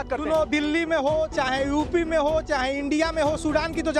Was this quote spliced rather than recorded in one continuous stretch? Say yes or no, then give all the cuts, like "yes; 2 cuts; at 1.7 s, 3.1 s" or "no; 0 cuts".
no; 0 cuts